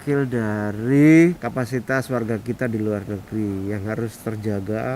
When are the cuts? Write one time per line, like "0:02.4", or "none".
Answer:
0:01.4